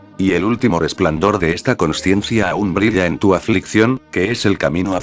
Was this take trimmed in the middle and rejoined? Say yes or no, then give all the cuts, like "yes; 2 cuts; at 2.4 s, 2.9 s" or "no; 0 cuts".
yes; 1 cut; at 3.6 s